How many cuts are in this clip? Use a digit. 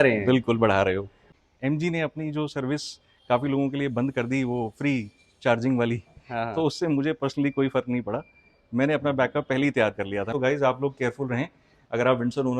2